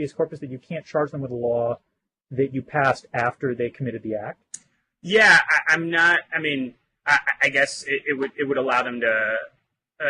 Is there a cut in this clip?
yes; 1 cut; at 5.1 s

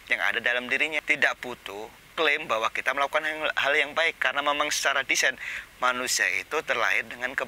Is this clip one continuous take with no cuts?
no; 1 cut; at 1.0 s

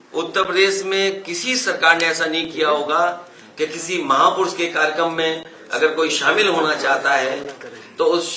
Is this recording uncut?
yes; 0 cuts

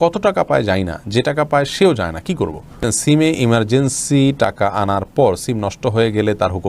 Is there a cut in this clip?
yes; 1 cut; at 2.8 s

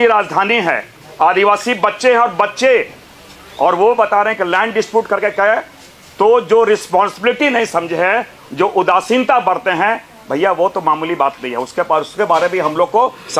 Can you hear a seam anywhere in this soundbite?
no; 0 cuts

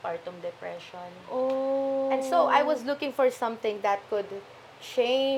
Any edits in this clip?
no; 0 cuts

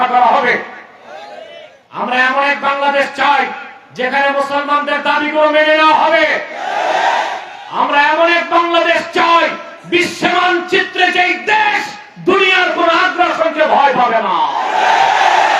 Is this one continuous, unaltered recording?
yes; 0 cuts

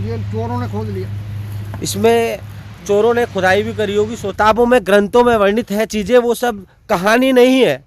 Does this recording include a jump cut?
yes; 1 cut; at 4.3 s

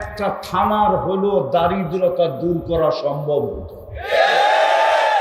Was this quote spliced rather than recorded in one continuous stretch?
no; 0 cuts

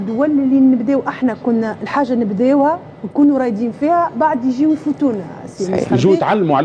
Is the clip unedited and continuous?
yes; 0 cuts

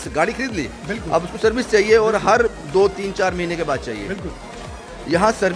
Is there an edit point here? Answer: no; 0 cuts

